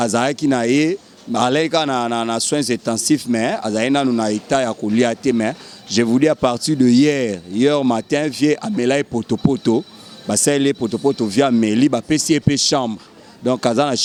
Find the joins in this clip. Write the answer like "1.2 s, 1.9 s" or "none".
none